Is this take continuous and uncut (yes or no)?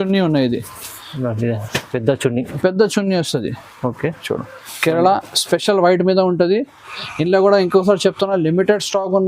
no